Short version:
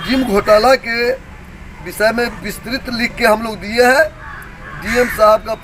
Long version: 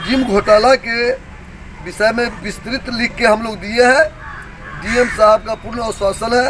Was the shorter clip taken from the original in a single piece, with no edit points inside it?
yes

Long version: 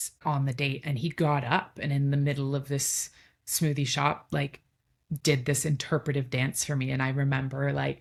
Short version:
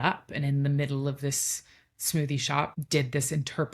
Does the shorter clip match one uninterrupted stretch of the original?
no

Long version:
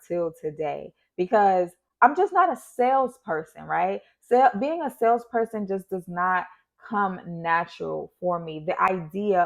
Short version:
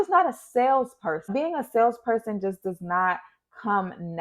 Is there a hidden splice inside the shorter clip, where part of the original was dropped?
yes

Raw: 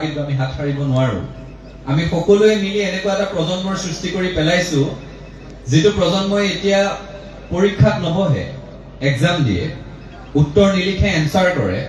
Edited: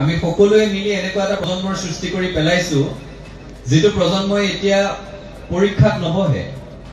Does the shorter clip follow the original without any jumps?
no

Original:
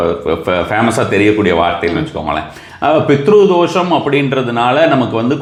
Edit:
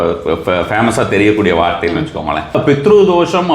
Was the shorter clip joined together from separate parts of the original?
yes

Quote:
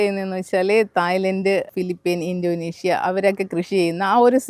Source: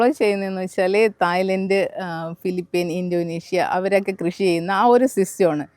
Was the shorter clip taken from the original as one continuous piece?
no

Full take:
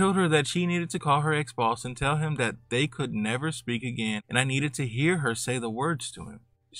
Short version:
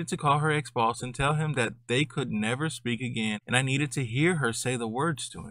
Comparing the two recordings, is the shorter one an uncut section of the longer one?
yes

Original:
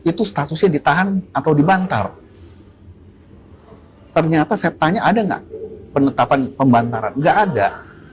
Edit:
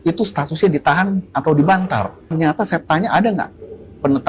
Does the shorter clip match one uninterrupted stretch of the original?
no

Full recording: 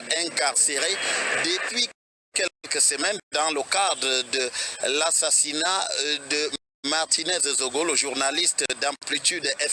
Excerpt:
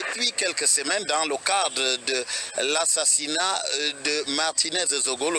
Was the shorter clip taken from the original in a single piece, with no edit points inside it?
no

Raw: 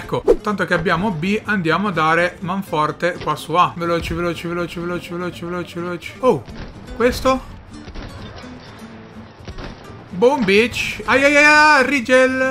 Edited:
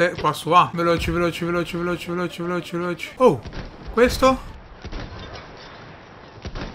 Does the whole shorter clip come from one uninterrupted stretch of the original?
yes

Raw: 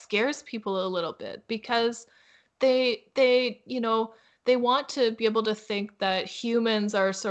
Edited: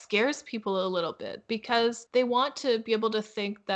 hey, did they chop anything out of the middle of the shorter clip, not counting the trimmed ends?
yes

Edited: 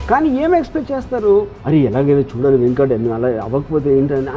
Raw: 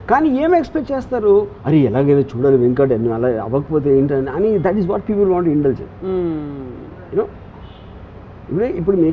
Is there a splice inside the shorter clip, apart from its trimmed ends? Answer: no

